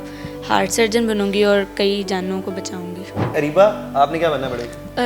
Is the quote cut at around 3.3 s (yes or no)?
yes